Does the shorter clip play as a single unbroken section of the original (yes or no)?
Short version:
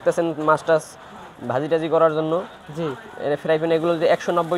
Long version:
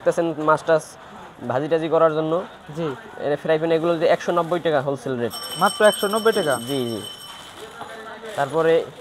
yes